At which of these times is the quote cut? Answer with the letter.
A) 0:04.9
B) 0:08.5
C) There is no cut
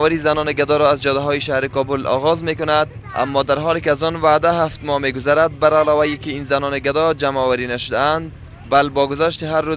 B